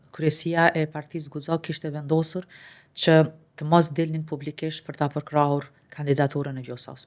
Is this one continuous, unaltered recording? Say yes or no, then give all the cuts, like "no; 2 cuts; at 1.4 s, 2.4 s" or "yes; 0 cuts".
yes; 0 cuts